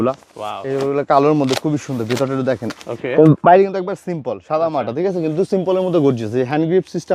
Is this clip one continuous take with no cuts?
yes; 0 cuts

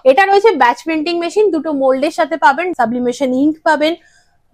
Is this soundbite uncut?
no; 1 cut; at 2.7 s

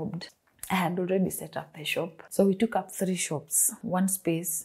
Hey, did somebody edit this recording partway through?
yes; 2 cuts; at 2.2 s, 3.7 s

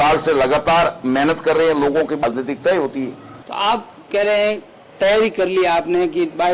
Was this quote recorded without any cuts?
no; 1 cut; at 2.2 s

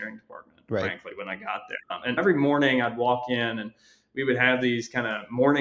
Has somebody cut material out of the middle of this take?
yes; 1 cut; at 2.2 s

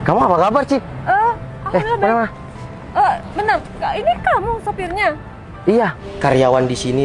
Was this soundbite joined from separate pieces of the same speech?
yes; 1 cut; at 6.0 s

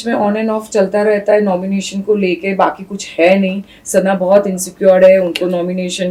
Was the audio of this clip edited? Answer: no; 0 cuts

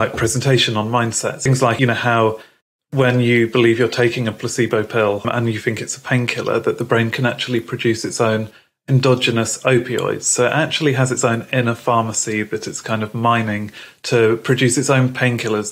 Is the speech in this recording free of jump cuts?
no; 2 cuts; at 1.5 s, 5.2 s

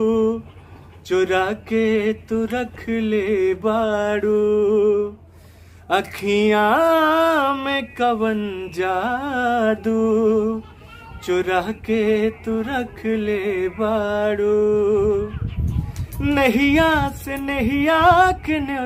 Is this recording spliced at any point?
no; 0 cuts

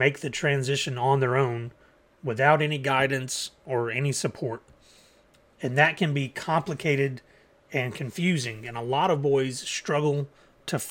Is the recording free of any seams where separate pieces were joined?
yes; 0 cuts

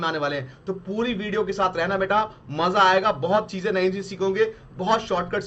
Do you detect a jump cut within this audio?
no; 0 cuts

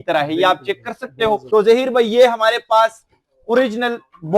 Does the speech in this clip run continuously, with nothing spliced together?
no; 1 cut; at 1.4 s

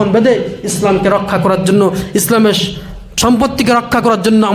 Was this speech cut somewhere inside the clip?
yes; 1 cut; at 3.0 s

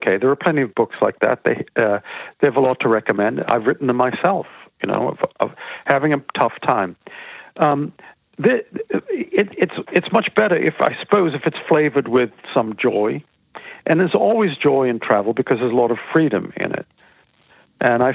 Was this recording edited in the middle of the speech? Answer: no; 0 cuts

